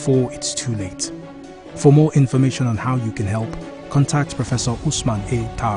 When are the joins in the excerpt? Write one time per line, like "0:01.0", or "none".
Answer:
none